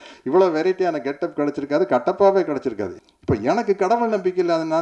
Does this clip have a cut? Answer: yes; 1 cut; at 2.9 s

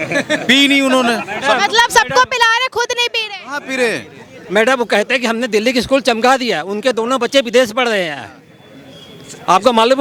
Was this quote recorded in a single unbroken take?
yes; 0 cuts

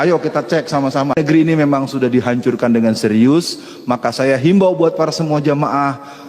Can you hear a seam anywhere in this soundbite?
yes; 1 cut; at 1.1 s

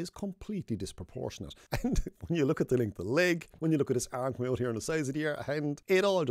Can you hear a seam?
no; 0 cuts

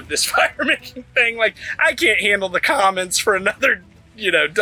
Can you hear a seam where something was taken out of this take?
no; 0 cuts

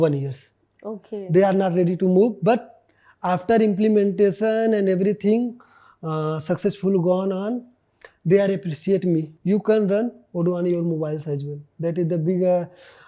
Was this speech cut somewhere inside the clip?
yes; 1 cut; at 9.3 s

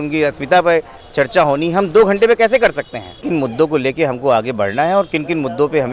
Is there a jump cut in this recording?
yes; 1 cut; at 3.2 s

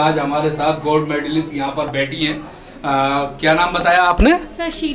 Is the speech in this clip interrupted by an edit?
no; 0 cuts

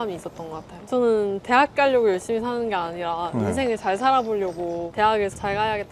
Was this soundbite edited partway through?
no; 0 cuts

